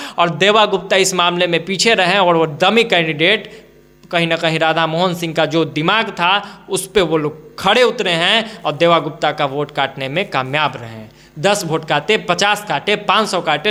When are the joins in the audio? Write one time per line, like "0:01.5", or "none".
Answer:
none